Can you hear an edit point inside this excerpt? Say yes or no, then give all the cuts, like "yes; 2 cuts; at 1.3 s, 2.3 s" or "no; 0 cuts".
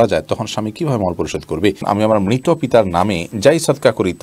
yes; 1 cut; at 1.8 s